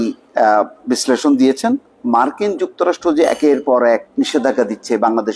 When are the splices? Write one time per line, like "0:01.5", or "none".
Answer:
0:01.9
0:04.1